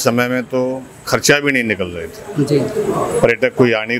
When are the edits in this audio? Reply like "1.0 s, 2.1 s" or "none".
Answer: none